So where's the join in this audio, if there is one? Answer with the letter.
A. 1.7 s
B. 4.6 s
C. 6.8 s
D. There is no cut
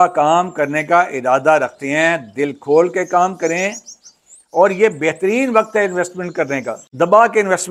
C